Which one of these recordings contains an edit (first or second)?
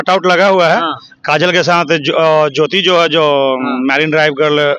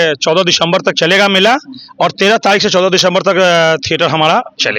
first